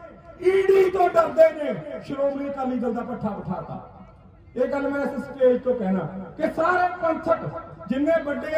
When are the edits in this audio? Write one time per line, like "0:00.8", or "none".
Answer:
none